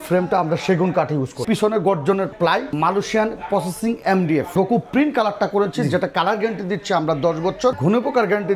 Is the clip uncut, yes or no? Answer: no